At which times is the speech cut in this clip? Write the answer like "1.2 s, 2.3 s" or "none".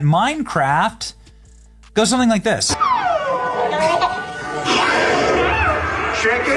2.7 s